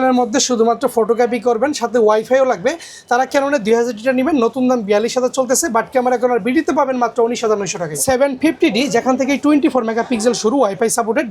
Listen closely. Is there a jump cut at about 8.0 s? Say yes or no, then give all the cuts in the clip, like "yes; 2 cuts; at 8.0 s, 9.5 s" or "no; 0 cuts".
yes; 1 cut; at 8.0 s